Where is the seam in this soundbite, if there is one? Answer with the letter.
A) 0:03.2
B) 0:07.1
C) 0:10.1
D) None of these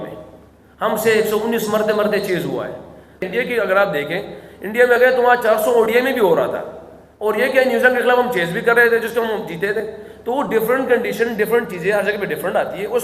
A